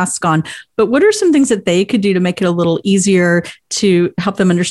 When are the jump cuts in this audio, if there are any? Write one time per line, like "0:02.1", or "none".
none